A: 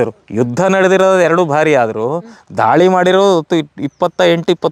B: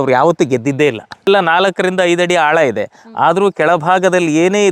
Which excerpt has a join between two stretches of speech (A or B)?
B